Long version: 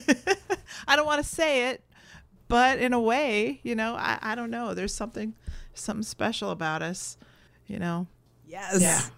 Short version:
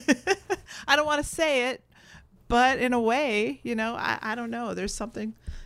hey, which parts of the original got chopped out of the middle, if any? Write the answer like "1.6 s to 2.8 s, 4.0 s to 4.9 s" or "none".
none